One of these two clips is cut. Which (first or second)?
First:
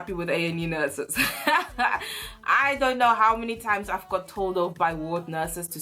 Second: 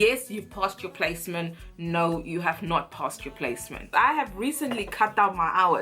second